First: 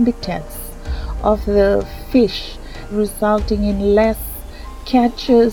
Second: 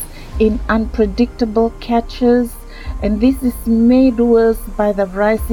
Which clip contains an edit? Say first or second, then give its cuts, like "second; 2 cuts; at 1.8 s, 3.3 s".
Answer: first; 1 cut; at 2.9 s